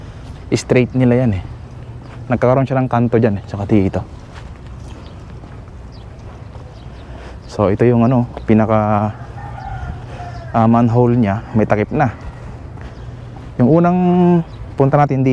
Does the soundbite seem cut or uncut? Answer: uncut